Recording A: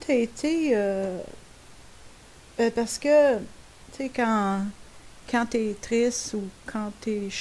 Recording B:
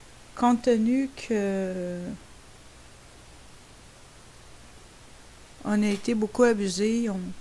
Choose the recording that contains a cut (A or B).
A